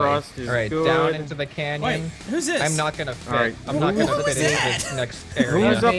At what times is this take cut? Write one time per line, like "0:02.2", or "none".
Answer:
none